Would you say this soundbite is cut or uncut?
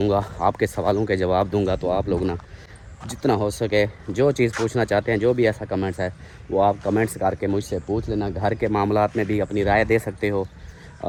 uncut